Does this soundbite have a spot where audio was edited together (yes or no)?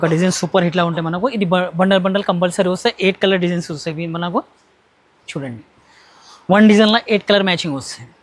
no